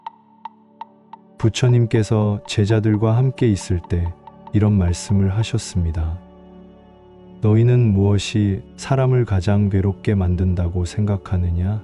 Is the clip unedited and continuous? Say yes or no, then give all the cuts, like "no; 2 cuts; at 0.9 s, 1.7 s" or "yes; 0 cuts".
no; 1 cut; at 1.3 s